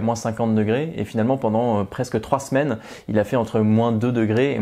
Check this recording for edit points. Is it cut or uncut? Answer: uncut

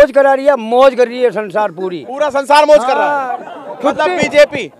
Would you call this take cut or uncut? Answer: cut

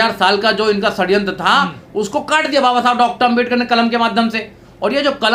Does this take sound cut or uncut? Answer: uncut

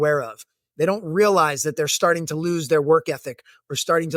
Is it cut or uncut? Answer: uncut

